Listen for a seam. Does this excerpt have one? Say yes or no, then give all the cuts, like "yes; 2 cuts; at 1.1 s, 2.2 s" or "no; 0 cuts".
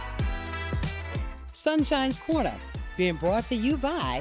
yes; 1 cut; at 1.2 s